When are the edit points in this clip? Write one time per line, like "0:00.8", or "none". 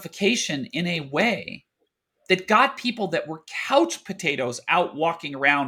none